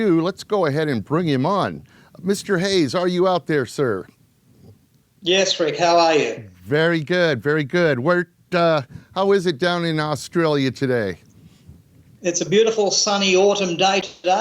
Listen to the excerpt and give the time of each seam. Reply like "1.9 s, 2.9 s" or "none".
6.6 s